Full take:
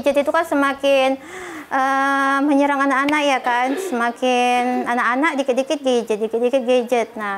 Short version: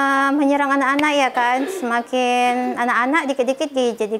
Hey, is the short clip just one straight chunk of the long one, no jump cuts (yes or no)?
yes